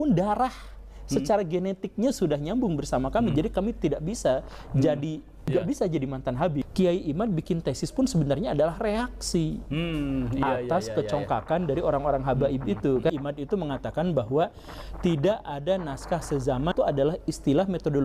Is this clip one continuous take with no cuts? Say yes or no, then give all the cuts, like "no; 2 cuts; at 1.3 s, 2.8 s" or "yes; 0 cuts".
no; 4 cuts; at 5.5 s, 6.7 s, 13.1 s, 16.7 s